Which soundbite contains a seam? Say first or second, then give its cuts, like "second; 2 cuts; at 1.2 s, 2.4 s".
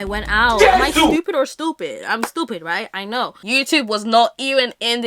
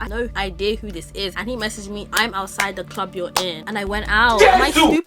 first; 1 cut; at 3.4 s